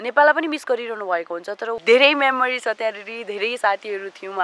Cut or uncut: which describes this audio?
cut